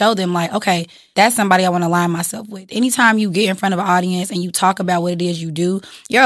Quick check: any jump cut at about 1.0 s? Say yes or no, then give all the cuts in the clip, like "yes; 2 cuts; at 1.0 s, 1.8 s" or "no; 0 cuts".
yes; 1 cut; at 1.0 s